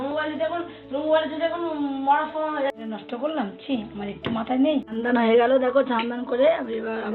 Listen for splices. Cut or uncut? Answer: cut